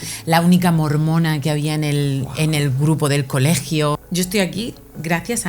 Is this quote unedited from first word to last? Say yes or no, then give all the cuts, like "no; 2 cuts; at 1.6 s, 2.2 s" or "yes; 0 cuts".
no; 1 cut; at 4.0 s